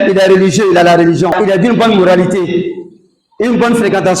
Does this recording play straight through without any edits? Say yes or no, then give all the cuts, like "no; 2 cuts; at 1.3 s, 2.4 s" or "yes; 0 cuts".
no; 1 cut; at 1.4 s